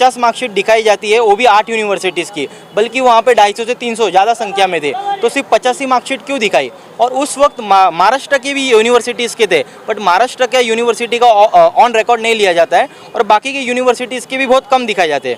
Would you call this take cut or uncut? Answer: uncut